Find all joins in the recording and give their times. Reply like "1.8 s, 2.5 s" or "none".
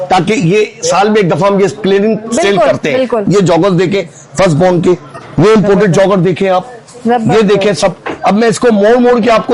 3.2 s